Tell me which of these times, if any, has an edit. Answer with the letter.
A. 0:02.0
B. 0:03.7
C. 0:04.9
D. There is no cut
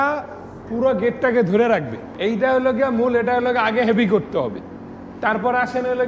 A